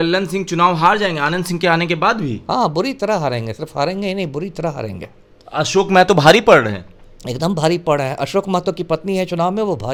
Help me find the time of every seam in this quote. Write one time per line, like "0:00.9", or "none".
none